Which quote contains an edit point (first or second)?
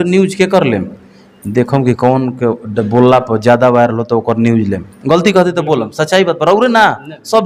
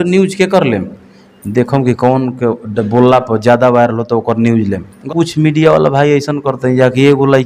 second